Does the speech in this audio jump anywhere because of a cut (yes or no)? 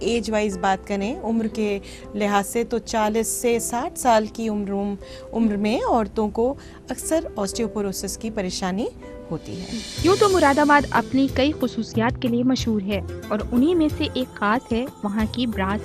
yes